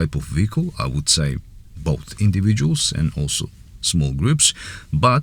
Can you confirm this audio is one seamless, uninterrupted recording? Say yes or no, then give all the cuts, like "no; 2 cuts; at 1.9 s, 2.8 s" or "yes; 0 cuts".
yes; 0 cuts